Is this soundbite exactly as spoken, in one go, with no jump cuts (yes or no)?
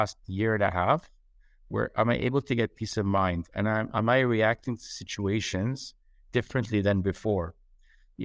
yes